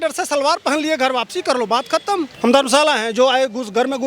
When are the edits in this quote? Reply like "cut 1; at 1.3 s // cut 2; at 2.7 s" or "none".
cut 1; at 2.3 s